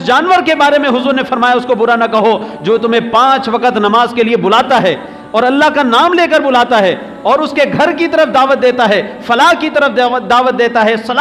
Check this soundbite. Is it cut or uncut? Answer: uncut